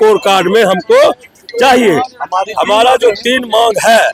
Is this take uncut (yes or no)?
yes